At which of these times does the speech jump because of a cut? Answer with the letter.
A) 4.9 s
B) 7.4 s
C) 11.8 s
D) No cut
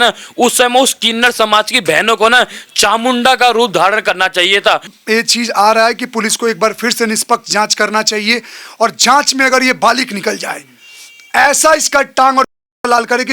A